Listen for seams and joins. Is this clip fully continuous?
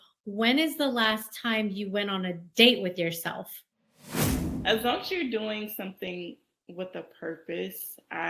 no; 1 cut; at 4.2 s

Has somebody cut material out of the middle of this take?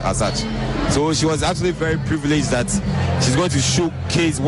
yes; 1 cut; at 2.9 s

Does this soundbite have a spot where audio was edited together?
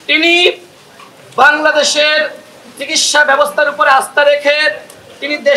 no; 0 cuts

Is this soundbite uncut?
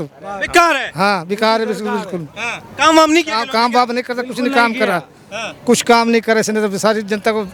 yes; 0 cuts

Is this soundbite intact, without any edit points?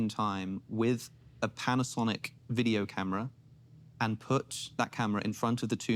yes; 0 cuts

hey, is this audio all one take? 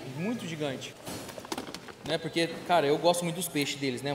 no; 1 cut; at 0.9 s

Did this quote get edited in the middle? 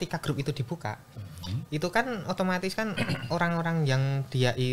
no; 0 cuts

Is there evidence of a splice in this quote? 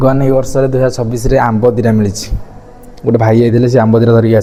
no; 0 cuts

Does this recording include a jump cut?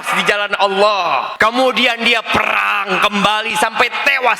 yes; 1 cut; at 1.3 s

